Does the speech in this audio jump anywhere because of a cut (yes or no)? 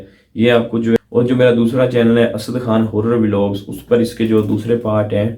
yes